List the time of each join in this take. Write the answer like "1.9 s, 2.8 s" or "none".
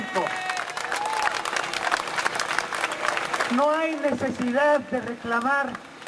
none